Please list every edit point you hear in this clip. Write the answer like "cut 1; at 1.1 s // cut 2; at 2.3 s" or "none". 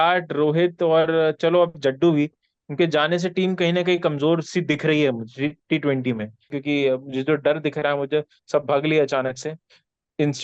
cut 1; at 6.5 s